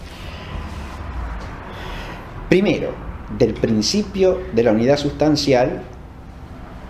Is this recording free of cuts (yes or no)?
no